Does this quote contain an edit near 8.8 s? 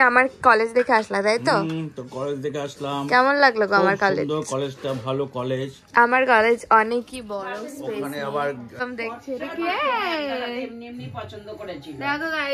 yes; 1 cut; at 8.8 s

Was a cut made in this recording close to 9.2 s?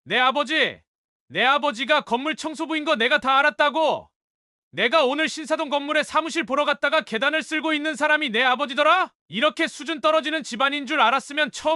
yes; 1 cut; at 9.2 s

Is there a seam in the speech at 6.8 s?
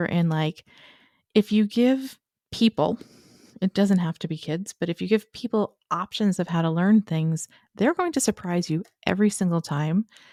no; 0 cuts

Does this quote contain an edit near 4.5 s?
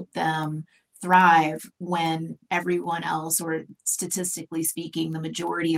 no; 0 cuts

